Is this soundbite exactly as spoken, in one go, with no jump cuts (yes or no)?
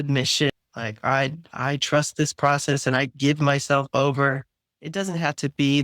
no